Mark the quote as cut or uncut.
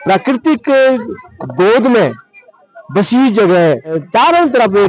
cut